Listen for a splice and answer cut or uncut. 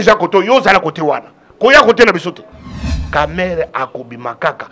cut